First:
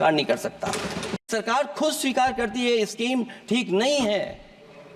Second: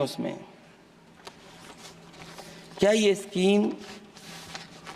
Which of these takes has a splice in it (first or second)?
first